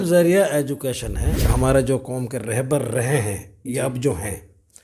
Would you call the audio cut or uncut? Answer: cut